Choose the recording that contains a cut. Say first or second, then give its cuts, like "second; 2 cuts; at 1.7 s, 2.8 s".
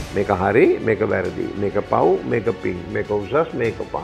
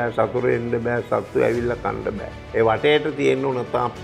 second; 1 cut; at 2.3 s